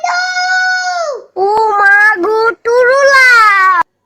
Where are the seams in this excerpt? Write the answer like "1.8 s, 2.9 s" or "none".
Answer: none